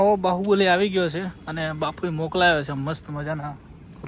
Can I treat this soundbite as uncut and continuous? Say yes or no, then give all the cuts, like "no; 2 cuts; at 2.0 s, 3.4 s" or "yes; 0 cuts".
yes; 0 cuts